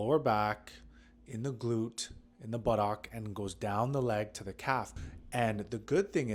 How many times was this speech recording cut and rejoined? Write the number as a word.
one